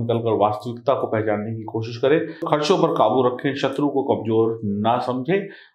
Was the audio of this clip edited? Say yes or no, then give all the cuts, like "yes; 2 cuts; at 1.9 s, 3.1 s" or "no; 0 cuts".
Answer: yes; 1 cut; at 2.4 s